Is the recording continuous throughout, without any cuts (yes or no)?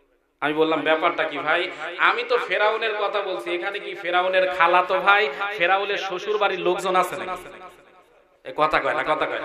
yes